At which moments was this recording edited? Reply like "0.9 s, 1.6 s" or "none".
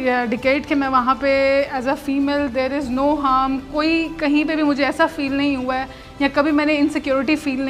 none